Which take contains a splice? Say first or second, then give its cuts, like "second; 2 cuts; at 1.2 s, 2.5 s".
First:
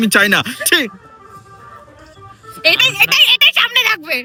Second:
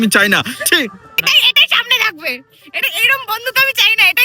second; 1 cut; at 1.2 s